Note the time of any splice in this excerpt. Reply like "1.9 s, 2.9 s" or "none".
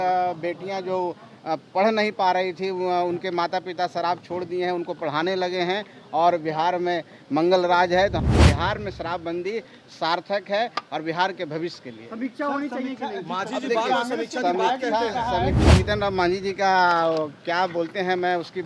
8.2 s, 15.7 s